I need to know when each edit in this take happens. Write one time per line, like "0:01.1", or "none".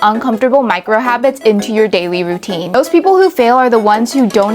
0:02.7

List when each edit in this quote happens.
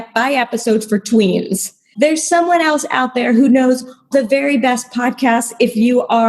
0:04.1

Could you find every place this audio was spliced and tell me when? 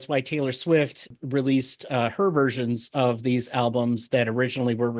0:01.1

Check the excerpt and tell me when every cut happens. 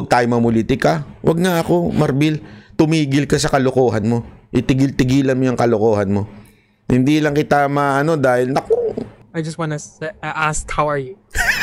0:09.1

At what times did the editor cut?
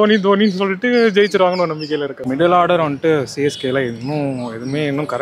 0:02.1

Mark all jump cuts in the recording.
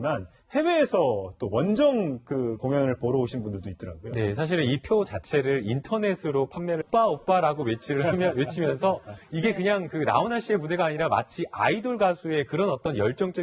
none

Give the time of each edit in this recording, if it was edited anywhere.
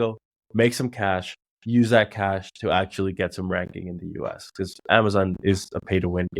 none

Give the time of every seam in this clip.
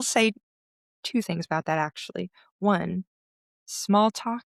none

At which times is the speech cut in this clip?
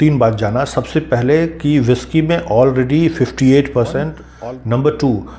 0:04.2

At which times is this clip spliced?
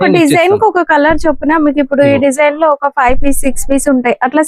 none

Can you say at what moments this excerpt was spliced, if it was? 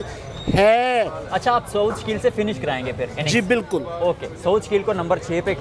none

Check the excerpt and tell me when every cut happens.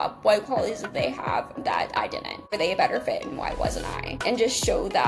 0:02.5
0:04.2

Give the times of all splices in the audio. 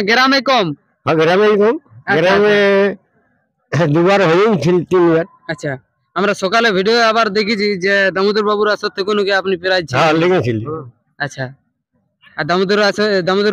none

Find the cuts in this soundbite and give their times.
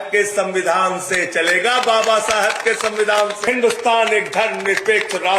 0:03.4

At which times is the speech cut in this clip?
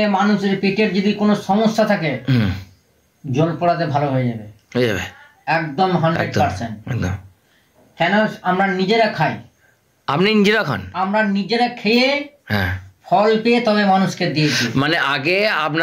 none

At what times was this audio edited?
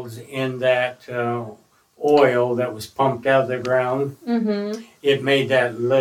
none

